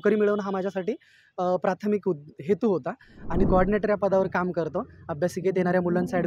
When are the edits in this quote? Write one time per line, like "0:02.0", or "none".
0:03.5